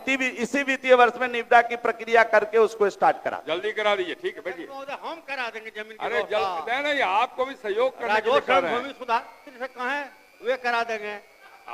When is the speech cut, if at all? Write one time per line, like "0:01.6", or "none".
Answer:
none